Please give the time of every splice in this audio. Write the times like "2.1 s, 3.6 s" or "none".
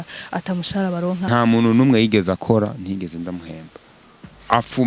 1.3 s